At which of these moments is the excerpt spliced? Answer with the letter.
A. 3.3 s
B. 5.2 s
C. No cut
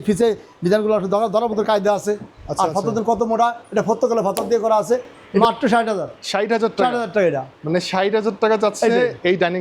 B